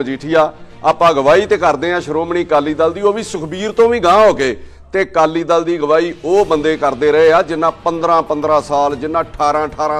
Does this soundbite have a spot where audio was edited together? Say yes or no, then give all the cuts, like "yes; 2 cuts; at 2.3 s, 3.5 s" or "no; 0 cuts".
no; 0 cuts